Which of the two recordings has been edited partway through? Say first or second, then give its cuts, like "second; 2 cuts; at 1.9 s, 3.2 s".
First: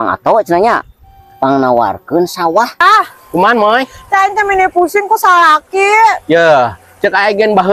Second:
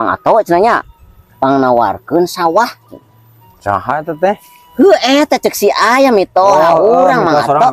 first; 1 cut; at 2.8 s